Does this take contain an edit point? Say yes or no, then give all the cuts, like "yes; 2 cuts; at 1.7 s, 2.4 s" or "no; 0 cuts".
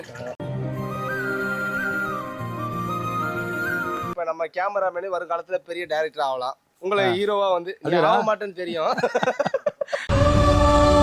yes; 1 cut; at 4.0 s